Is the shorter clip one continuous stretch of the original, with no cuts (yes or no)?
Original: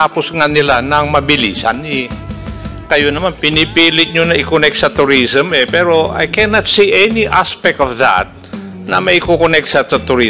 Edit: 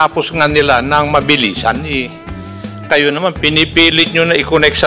yes